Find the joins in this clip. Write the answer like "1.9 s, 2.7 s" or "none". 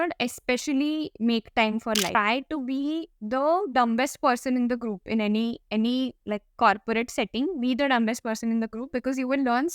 2.1 s